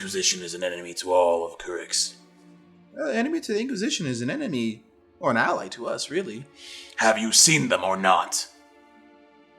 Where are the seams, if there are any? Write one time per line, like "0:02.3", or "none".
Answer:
0:08.4